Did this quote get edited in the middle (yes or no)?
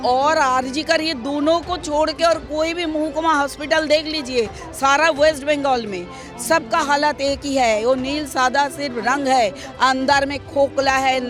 no